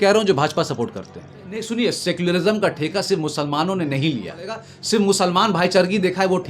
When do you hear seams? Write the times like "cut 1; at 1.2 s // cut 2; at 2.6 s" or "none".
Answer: cut 1; at 1.7 s // cut 2; at 4.7 s